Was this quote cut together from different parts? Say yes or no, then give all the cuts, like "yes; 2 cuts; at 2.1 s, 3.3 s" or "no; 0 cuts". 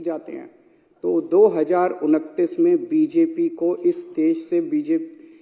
no; 0 cuts